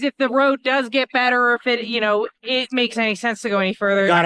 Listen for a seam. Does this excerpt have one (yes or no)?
no